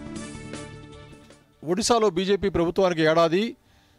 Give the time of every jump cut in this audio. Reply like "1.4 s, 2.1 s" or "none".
1.0 s